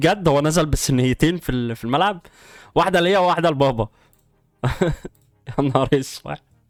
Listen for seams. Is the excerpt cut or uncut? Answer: uncut